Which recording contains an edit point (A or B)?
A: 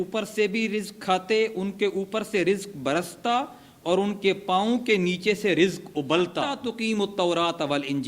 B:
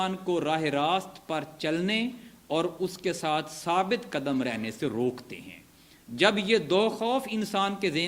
A